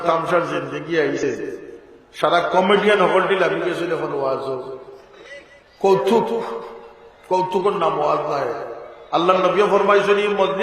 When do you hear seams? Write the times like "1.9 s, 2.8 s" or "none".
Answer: 1.2 s